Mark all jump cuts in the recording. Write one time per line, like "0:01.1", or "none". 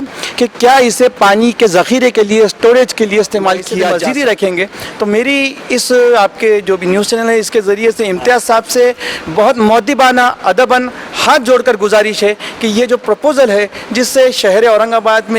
0:03.8